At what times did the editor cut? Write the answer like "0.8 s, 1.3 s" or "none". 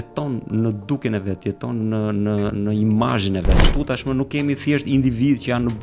3.6 s